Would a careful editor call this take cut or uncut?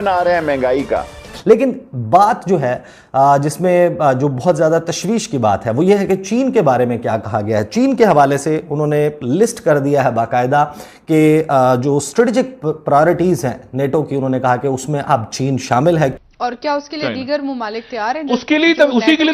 cut